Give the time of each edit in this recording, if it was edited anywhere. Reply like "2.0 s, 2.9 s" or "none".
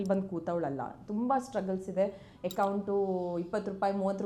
none

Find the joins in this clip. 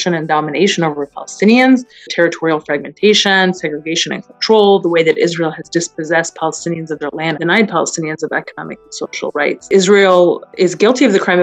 2.0 s, 7.4 s, 9.6 s

